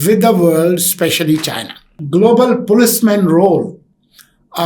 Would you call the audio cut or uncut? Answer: cut